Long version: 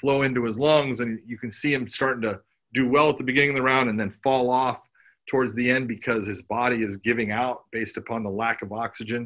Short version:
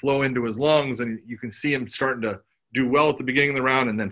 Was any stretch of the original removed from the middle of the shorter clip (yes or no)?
no